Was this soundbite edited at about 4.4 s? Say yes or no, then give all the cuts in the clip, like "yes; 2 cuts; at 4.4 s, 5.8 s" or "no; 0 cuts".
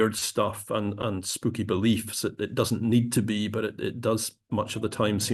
no; 0 cuts